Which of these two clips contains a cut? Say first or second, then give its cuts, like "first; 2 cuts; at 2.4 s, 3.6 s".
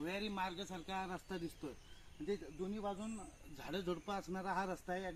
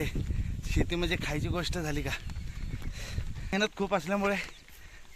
second; 1 cut; at 3.5 s